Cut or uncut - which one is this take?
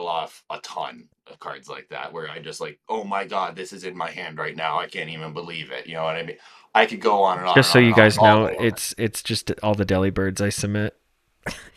uncut